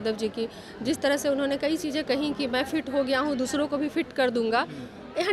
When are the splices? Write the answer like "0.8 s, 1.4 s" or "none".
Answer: none